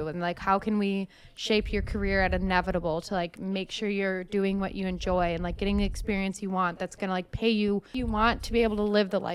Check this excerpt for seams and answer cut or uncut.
cut